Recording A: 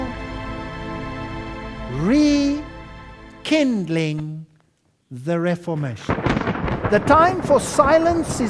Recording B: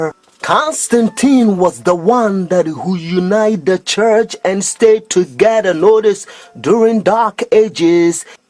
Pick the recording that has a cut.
A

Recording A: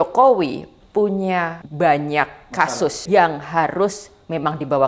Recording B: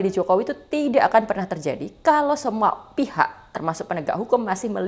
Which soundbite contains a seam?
A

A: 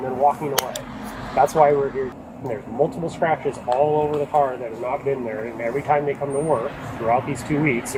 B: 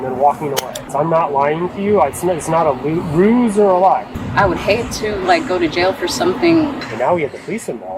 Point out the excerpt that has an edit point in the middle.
B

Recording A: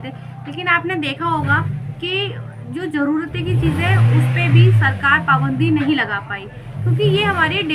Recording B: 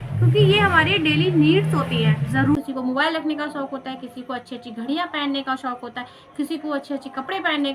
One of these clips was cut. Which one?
B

